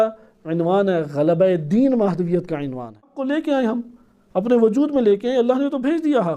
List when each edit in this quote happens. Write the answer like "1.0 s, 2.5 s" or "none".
3.2 s